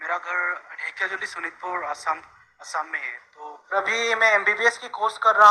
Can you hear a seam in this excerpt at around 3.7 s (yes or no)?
yes